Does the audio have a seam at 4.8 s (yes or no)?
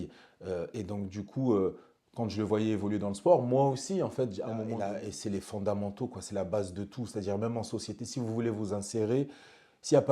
yes